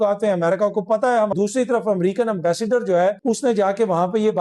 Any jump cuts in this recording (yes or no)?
yes